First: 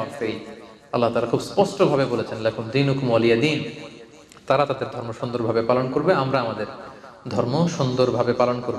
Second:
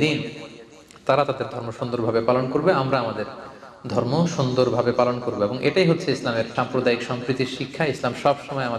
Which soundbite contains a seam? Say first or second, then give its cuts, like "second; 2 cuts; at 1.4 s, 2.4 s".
second; 1 cut; at 6.5 s